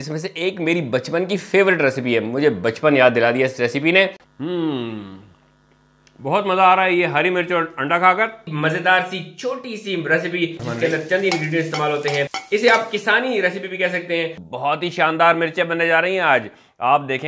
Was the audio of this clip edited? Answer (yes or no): yes